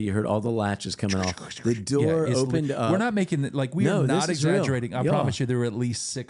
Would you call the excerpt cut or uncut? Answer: uncut